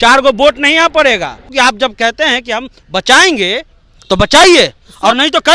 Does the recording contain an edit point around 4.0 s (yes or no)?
no